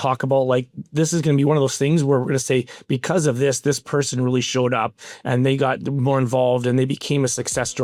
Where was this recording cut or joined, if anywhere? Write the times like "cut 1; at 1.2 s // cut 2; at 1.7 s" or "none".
none